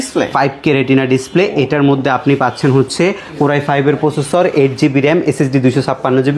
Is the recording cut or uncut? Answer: uncut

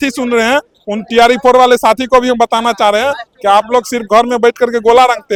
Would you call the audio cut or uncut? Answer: uncut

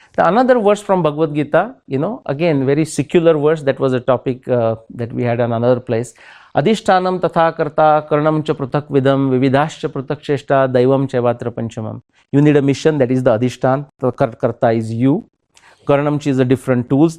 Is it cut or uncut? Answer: uncut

